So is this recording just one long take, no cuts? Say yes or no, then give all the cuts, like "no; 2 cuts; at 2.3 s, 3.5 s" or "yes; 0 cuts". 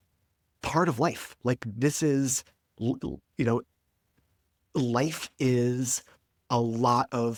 yes; 0 cuts